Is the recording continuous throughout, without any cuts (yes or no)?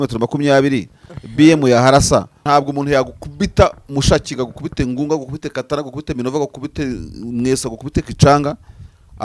no